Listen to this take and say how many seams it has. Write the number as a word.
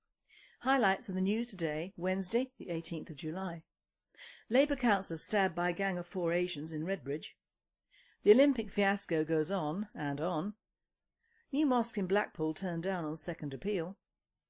one